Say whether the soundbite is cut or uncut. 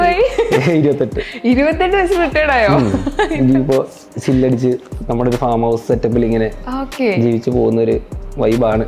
uncut